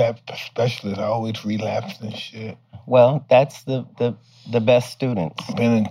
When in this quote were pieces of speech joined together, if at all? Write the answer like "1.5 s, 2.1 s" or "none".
2.7 s